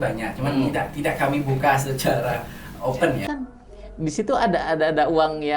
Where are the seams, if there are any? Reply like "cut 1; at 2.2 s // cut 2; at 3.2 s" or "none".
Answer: cut 1; at 3.3 s